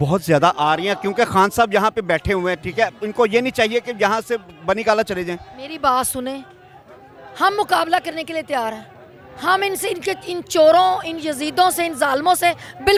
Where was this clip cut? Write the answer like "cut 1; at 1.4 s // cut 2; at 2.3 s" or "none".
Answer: none